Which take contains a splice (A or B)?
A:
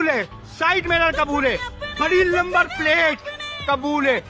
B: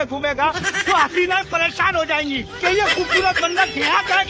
B